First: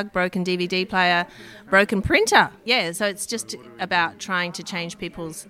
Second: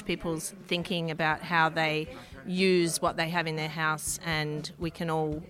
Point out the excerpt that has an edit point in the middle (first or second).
first